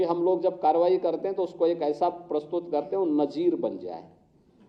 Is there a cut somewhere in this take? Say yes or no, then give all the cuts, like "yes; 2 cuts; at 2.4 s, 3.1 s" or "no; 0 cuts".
no; 0 cuts